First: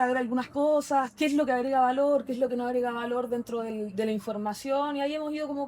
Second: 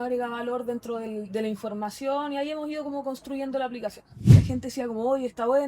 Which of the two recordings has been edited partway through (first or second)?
second